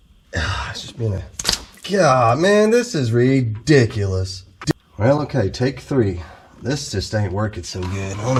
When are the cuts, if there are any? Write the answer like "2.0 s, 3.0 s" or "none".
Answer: none